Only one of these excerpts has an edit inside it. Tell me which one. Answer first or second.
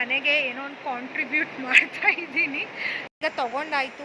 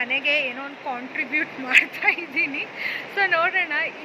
first